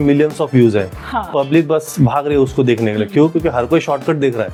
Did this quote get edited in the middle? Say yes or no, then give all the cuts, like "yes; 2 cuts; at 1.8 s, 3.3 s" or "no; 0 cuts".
no; 0 cuts